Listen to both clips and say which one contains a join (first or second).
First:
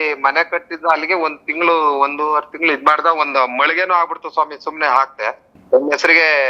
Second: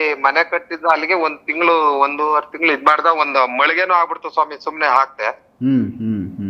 first